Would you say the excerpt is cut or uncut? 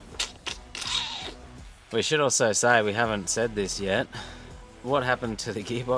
cut